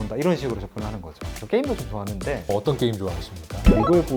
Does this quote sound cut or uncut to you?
cut